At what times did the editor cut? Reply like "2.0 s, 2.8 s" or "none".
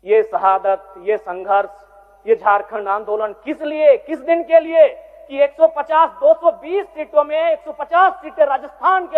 none